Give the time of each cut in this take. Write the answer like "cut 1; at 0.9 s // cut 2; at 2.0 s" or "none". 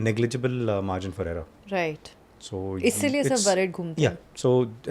none